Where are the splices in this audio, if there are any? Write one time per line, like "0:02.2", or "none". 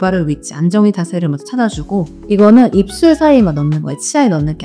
0:02.1